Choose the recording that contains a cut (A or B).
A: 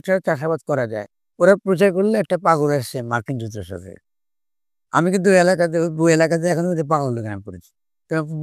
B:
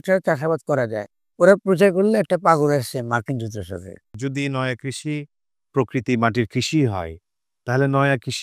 B